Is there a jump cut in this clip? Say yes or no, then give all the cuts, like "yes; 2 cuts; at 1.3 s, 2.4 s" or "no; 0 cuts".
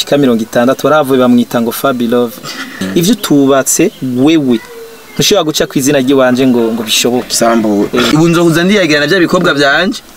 yes; 2 cuts; at 2.8 s, 8.1 s